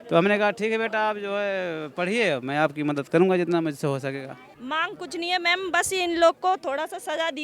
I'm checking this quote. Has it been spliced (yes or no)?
yes